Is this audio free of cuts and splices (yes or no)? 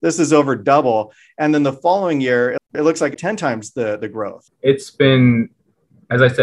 yes